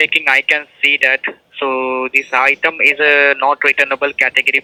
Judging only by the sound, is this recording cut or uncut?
uncut